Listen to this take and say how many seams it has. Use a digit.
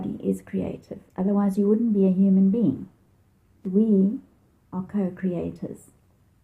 1